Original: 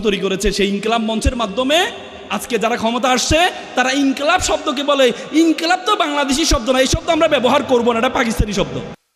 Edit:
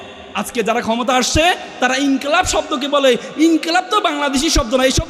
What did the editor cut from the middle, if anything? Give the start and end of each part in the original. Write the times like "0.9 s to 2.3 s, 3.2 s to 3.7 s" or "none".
none